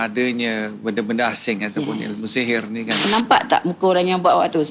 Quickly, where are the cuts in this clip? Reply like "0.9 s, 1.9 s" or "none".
3.1 s

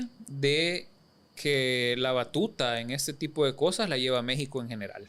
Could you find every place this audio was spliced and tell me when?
none

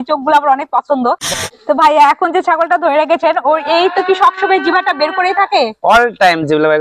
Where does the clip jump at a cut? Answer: 1.4 s

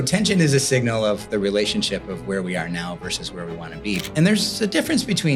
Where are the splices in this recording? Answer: 4.0 s

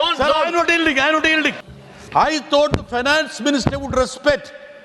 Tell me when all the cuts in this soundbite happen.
1.6 s

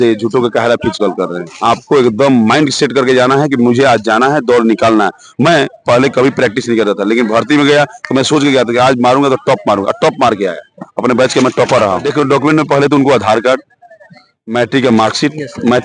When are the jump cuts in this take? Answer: 1.2 s, 12.1 s

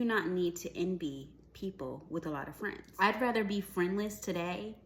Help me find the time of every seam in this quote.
2.9 s

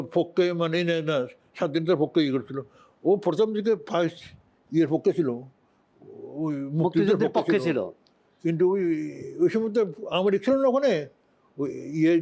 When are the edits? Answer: none

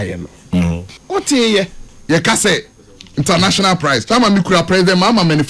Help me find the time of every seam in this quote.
0.9 s, 1.9 s

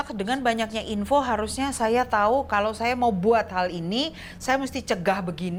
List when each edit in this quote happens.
none

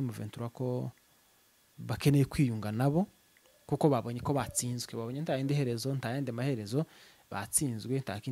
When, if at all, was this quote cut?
none

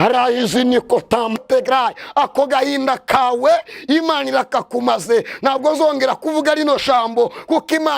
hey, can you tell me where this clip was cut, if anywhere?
1.4 s

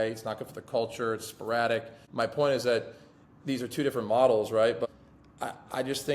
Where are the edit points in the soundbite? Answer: 2.0 s, 4.9 s

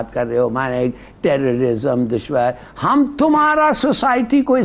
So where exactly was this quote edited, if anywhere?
none

